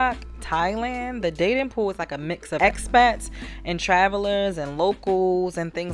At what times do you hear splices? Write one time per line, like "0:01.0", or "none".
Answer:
none